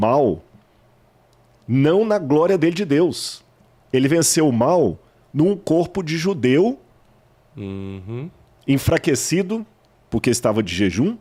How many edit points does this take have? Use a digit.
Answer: 0